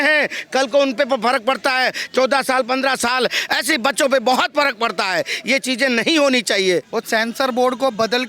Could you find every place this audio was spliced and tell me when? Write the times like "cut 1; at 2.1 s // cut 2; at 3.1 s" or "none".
cut 1; at 6.9 s